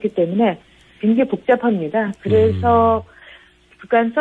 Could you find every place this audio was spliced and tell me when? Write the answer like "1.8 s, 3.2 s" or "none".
1.1 s